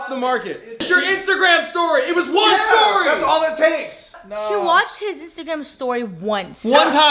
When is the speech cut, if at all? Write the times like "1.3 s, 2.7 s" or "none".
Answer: 0.8 s, 4.1 s